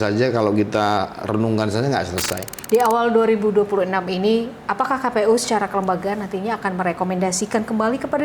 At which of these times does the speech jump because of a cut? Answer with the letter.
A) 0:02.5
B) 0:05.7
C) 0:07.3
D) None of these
A